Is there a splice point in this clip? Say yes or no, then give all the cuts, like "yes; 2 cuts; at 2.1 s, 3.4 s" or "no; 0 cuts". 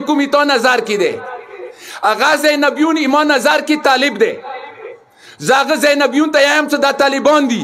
no; 0 cuts